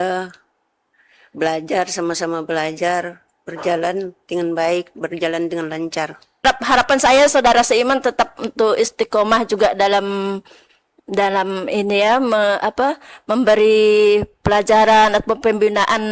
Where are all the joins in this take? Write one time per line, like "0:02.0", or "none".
0:06.4